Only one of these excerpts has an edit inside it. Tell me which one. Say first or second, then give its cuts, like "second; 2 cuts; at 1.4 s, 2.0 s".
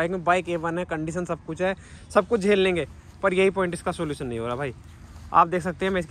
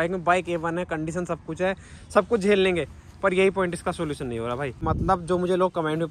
second; 1 cut; at 4.9 s